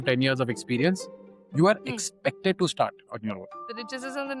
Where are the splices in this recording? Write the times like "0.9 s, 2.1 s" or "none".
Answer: 3.5 s